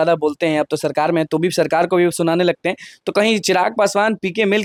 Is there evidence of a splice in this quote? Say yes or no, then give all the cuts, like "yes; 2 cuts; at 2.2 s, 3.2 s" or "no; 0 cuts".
no; 0 cuts